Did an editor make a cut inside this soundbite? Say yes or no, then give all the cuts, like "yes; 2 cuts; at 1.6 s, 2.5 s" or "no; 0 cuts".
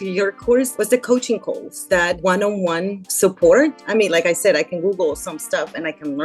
yes; 2 cuts; at 2.2 s, 3.8 s